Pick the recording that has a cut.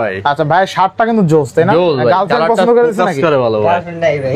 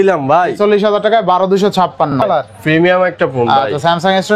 second; 1 cut; at 2.2 s

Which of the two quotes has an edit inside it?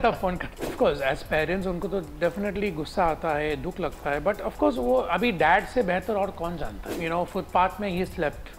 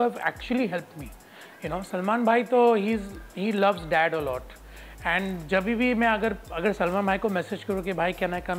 first; 2 cuts; at 0.7 s, 6.9 s

